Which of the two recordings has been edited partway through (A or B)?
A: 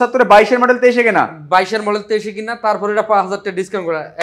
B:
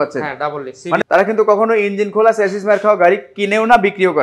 B